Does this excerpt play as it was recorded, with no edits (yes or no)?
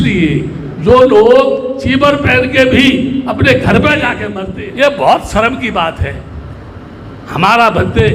no